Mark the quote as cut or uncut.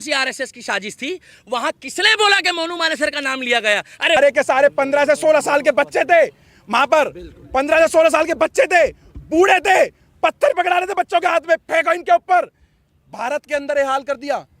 cut